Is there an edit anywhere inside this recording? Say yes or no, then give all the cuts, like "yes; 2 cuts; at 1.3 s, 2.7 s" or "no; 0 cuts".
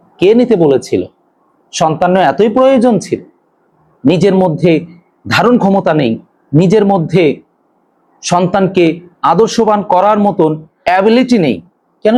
no; 0 cuts